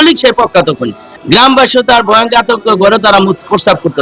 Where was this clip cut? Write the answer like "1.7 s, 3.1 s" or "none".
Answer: 1.1 s